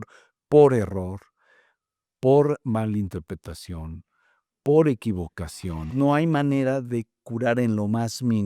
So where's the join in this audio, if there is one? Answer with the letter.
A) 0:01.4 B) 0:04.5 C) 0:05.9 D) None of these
C